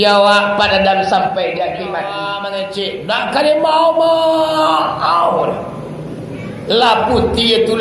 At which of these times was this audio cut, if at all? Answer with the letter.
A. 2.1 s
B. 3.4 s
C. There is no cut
A